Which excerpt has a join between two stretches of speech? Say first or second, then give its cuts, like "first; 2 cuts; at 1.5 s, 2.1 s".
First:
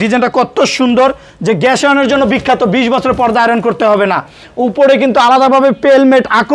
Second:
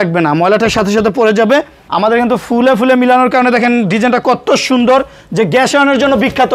second; 1 cut; at 1.8 s